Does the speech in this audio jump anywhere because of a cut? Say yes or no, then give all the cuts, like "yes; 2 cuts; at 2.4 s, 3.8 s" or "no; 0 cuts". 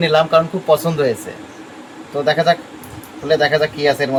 no; 0 cuts